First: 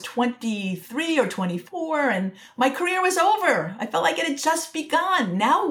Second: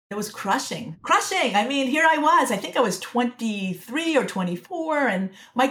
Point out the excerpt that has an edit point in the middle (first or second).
second